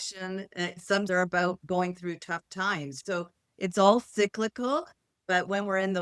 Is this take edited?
yes; 2 cuts; at 1.1 s, 3.0 s

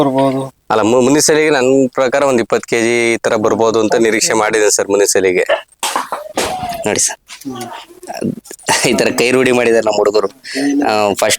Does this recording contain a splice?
yes; 1 cut; at 5.8 s

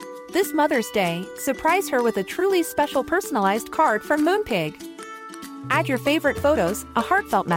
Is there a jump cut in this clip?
no; 0 cuts

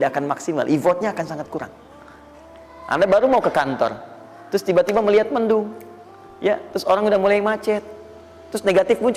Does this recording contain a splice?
no; 0 cuts

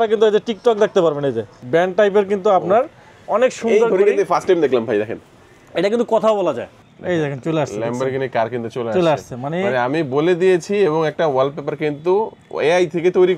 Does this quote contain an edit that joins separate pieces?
yes; 2 cuts; at 1.6 s, 6.7 s

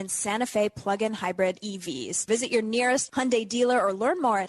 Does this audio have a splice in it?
yes; 1 cut; at 2.2 s

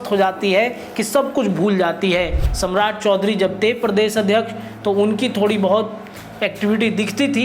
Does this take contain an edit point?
yes; 1 cut; at 2.5 s

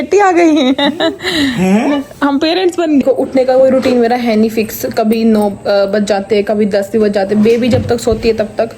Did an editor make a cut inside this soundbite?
yes; 1 cut; at 3.0 s

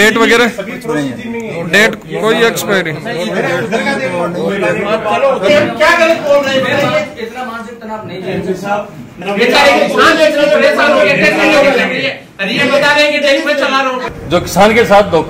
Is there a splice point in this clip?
yes; 3 cuts; at 5.5 s, 9.1 s, 14.0 s

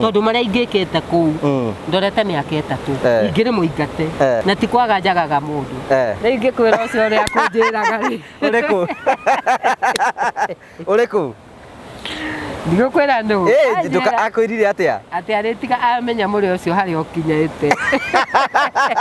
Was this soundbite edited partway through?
yes; 1 cut; at 4.4 s

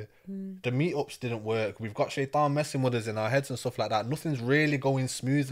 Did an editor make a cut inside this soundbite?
no; 0 cuts

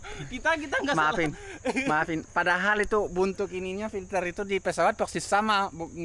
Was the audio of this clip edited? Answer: no; 0 cuts

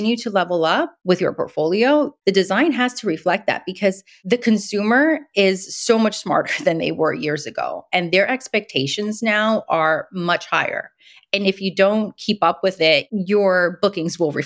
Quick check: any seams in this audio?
yes; 3 cuts; at 0.9 s, 2.1 s, 4.1 s

